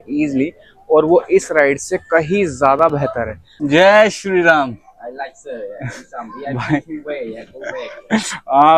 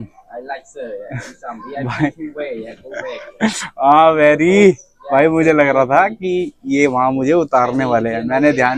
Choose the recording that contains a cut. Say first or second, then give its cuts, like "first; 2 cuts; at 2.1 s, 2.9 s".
first; 1 cut; at 3.5 s